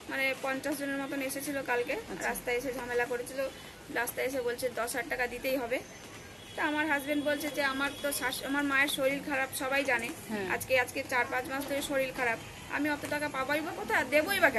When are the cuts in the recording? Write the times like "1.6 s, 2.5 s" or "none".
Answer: none